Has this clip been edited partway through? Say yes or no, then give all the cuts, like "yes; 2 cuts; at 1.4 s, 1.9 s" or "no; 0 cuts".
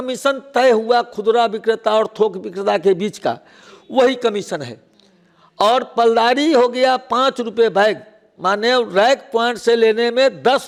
no; 0 cuts